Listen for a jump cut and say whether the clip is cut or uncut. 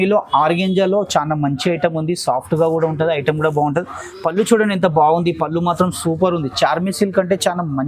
uncut